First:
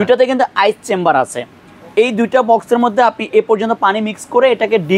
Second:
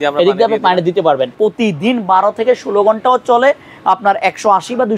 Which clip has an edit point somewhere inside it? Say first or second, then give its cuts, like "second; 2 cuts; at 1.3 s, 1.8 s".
second; 1 cut; at 1.3 s